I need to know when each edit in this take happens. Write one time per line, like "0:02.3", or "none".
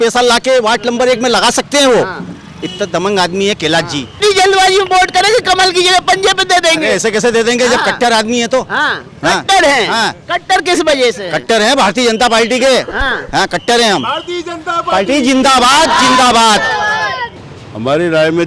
0:04.1
0:17.3